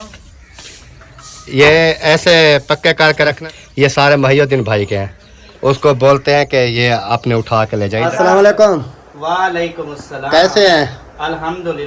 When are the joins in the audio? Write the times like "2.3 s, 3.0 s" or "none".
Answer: 3.4 s, 8.0 s